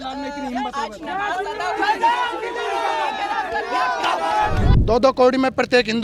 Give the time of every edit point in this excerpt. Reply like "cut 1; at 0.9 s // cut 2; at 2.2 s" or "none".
cut 1; at 4.7 s